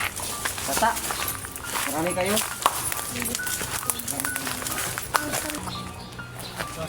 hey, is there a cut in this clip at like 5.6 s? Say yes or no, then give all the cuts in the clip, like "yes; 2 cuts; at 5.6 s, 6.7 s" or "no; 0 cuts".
yes; 1 cut; at 5.6 s